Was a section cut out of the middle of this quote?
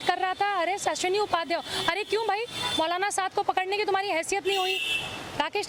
no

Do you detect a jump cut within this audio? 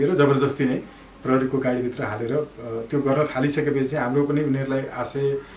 no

